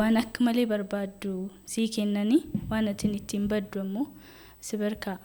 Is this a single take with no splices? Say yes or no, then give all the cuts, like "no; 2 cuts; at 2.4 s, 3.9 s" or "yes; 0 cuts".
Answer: yes; 0 cuts